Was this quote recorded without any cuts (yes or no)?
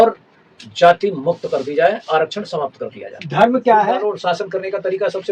no